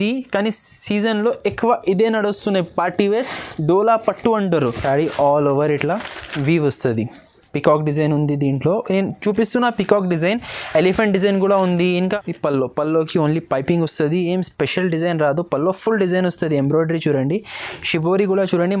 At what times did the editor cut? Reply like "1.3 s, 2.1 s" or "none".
4.8 s, 12.0 s